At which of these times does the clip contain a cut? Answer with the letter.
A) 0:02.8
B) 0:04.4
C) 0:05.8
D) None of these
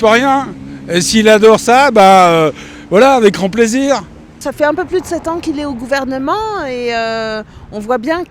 B